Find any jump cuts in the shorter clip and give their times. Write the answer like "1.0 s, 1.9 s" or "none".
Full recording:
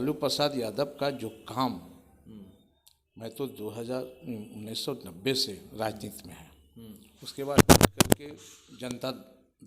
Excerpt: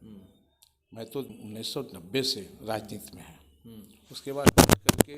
1.3 s